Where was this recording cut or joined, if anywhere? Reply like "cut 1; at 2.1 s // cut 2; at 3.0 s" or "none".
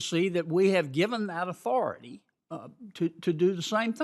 cut 1; at 2.1 s